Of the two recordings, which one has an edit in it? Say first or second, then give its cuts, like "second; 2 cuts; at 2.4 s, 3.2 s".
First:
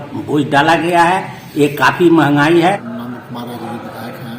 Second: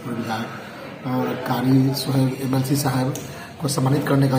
first; 1 cut; at 2.9 s